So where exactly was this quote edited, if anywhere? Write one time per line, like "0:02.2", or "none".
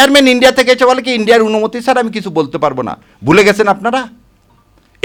none